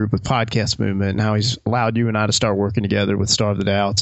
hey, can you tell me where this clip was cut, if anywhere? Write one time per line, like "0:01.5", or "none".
0:01.7